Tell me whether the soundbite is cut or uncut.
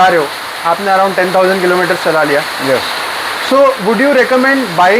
uncut